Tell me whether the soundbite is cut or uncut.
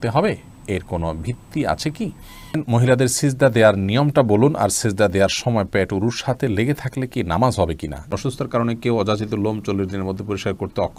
cut